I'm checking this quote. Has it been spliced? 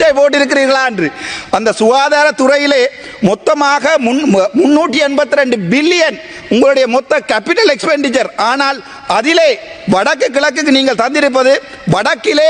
no; 0 cuts

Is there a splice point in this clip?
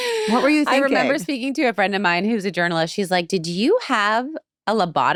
no; 0 cuts

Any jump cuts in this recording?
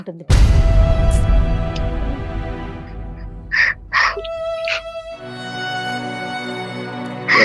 no; 0 cuts

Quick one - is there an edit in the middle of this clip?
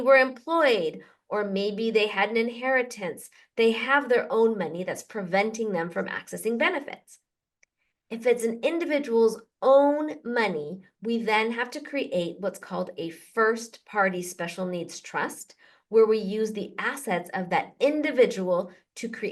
no; 0 cuts

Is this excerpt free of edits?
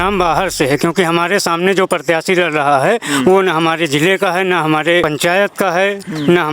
no; 1 cut; at 5.1 s

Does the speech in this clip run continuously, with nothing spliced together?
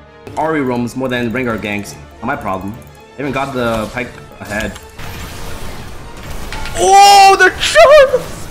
no; 2 cuts; at 2.0 s, 4.9 s

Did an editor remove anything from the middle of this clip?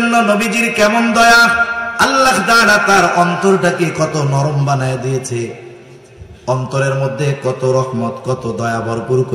no; 0 cuts

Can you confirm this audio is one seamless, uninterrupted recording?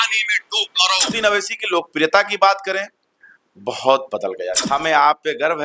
no; 2 cuts; at 1.1 s, 4.6 s

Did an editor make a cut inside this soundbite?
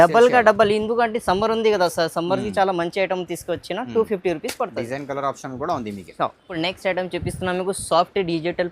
no; 0 cuts

